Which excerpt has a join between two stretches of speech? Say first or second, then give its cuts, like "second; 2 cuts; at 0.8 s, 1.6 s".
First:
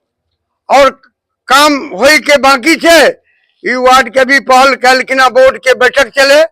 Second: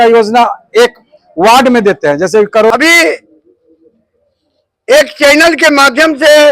second; 1 cut; at 2.7 s